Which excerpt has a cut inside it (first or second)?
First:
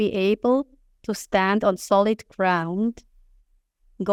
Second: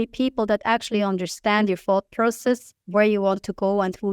second